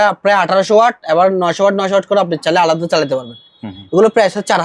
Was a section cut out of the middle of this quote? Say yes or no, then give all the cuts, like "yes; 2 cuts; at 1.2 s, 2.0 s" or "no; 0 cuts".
no; 0 cuts